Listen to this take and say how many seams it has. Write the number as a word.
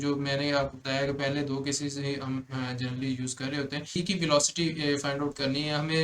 one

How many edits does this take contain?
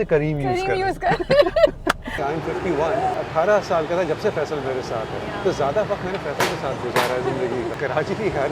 three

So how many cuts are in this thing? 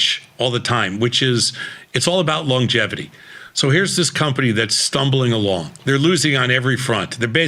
one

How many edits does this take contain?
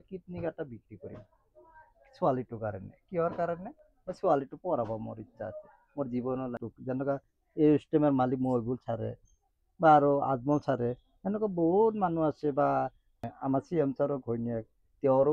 two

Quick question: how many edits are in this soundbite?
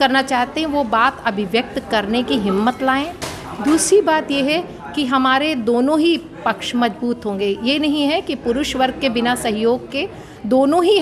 zero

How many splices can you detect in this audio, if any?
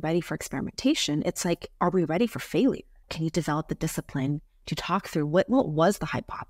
one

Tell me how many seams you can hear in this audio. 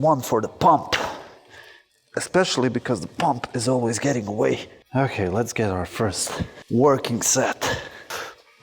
zero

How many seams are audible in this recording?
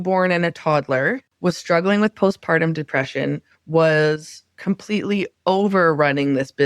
one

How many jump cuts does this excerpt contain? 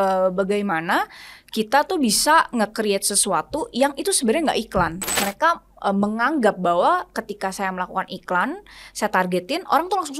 one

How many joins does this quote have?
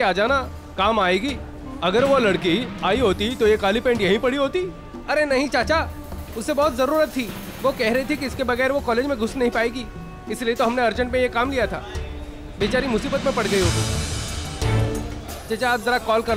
zero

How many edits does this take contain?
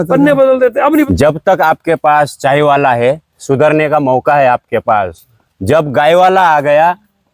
one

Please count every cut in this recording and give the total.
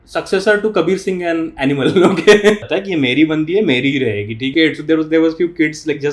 two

